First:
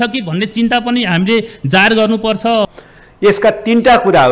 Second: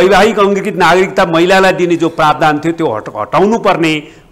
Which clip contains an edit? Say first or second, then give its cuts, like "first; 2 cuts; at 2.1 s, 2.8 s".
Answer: first; 1 cut; at 2.7 s